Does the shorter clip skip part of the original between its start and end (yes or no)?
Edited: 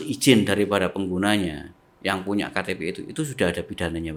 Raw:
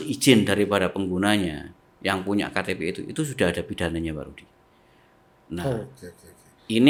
no